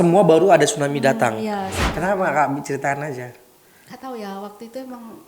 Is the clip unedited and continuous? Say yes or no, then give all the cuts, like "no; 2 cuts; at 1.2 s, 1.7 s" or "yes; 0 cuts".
no; 1 cut; at 1.8 s